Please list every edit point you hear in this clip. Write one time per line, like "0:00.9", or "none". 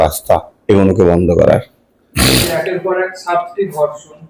none